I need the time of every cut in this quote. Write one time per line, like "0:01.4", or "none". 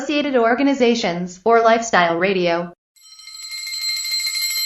none